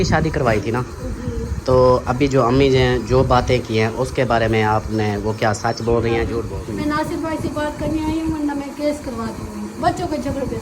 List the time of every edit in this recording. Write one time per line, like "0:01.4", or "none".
0:06.5